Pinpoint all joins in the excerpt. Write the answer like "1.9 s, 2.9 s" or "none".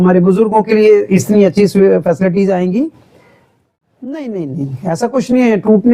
3.7 s